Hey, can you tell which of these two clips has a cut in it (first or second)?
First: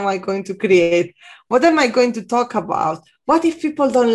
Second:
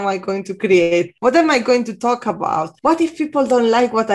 second